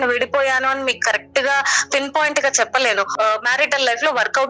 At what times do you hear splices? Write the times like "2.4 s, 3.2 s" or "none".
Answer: 3.1 s

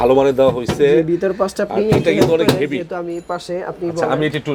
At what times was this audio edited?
none

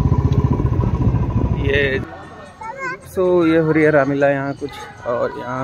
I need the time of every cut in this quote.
2.0 s

